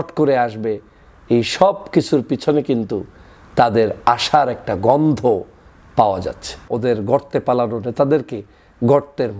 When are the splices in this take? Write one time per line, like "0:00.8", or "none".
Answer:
0:06.6